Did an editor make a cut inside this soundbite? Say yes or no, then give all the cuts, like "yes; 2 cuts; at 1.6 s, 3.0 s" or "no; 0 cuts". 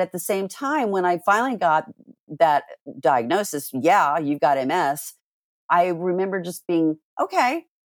no; 0 cuts